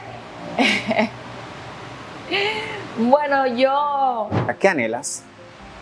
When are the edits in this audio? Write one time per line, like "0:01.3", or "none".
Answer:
0:04.5